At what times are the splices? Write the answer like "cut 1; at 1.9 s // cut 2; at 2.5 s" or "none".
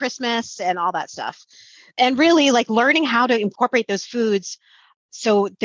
cut 1; at 3.5 s

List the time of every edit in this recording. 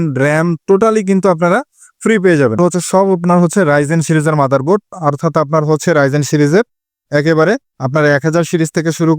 cut 1; at 2.6 s

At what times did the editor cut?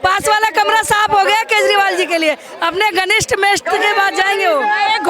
none

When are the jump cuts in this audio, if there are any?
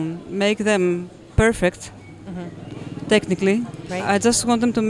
none

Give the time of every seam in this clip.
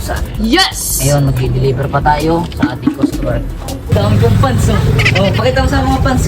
cut 1; at 3.9 s

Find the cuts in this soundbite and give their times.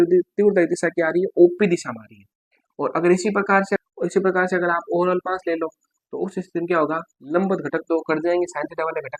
cut 1; at 3.8 s

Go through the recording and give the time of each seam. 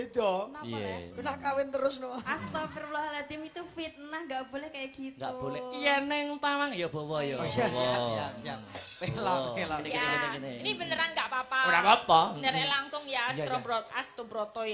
cut 1; at 9.9 s

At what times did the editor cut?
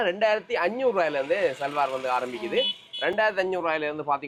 none

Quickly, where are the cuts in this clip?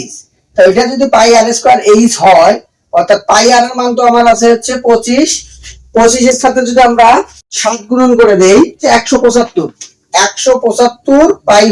cut 1; at 8.8 s

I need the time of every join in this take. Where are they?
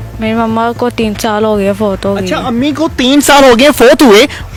none

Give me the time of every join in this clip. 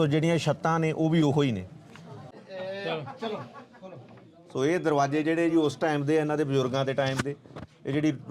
cut 1; at 2.4 s

